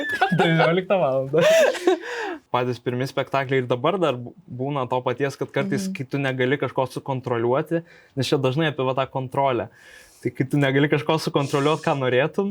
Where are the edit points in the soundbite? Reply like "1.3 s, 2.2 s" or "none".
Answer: 2.4 s